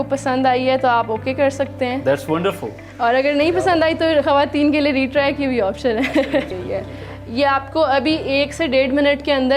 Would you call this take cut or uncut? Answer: cut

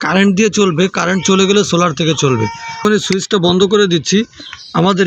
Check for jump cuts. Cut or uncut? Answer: cut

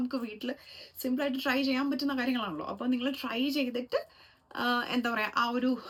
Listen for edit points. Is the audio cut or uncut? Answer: uncut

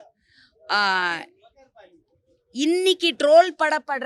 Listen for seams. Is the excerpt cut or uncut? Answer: uncut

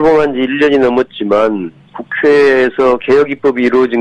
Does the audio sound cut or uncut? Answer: uncut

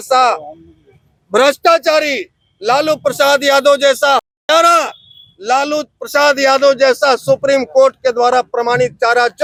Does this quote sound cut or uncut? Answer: uncut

